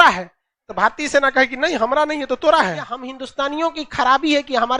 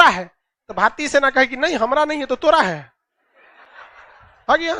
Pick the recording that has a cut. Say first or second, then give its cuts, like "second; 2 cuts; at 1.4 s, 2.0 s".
first; 1 cut; at 3.2 s